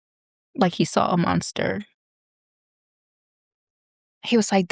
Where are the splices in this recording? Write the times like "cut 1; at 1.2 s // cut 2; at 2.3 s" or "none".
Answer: none